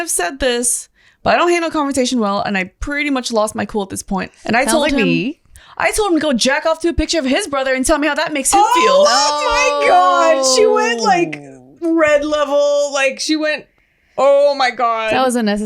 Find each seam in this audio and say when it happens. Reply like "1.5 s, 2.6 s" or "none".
4.3 s, 5.6 s